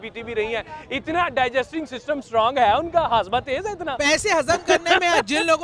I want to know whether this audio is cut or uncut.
uncut